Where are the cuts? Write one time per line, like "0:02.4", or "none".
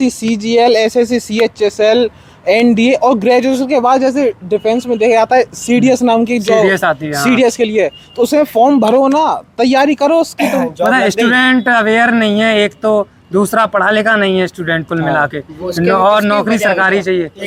none